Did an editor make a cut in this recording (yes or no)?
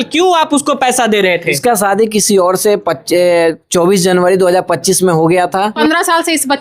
yes